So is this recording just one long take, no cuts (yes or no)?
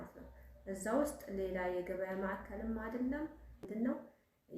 no